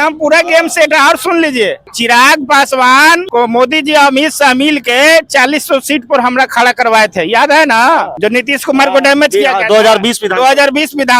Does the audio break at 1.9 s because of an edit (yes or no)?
yes